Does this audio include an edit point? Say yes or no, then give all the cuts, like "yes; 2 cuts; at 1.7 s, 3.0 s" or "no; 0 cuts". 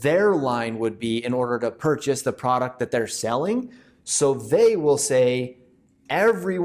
no; 0 cuts